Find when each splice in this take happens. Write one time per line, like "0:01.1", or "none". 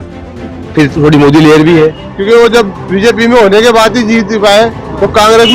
0:02.1